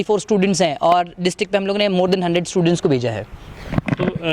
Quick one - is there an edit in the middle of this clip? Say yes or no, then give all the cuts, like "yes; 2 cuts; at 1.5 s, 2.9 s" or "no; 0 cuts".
no; 0 cuts